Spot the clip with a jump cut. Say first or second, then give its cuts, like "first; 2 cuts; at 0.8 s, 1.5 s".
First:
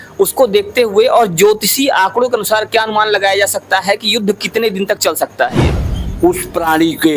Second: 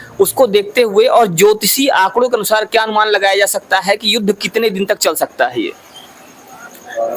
first; 1 cut; at 6.0 s